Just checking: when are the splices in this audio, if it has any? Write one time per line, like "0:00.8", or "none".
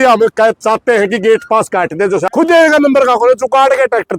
0:02.3